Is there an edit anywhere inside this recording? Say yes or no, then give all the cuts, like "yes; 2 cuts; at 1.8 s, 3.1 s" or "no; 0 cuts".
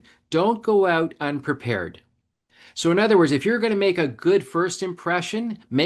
no; 0 cuts